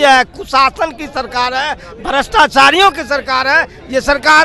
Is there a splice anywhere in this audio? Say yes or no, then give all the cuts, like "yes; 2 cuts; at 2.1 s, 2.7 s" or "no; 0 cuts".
no; 0 cuts